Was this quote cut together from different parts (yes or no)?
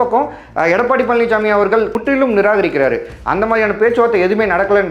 yes